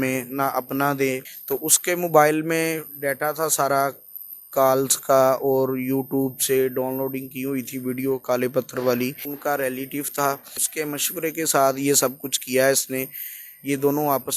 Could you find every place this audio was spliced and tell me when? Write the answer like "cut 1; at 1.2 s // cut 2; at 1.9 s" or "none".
cut 1; at 1.3 s // cut 2; at 9.3 s // cut 3; at 10.6 s